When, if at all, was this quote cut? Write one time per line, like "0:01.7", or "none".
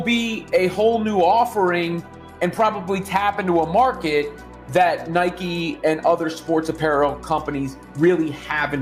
none